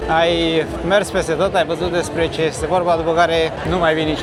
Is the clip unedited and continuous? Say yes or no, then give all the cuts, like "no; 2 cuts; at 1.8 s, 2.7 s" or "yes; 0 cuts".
yes; 0 cuts